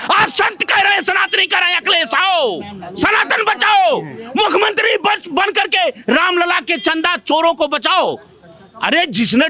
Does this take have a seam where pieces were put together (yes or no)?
no